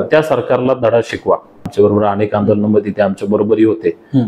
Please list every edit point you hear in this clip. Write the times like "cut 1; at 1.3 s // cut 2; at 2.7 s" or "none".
cut 1; at 1.7 s